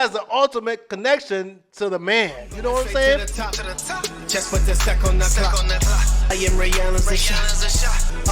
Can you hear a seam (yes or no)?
yes